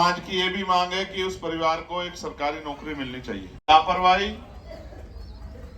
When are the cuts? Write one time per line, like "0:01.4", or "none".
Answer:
0:03.6